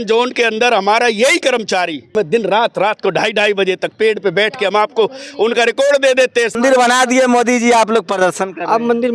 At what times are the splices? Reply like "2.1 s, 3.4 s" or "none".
2.1 s, 6.5 s